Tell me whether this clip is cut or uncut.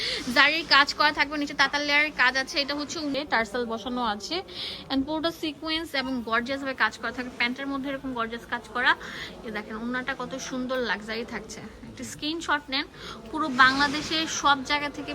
cut